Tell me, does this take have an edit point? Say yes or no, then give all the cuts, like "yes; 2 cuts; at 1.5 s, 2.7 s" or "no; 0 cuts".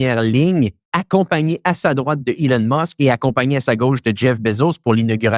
no; 0 cuts